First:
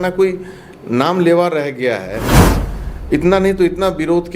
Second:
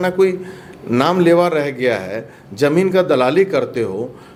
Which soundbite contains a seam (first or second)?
first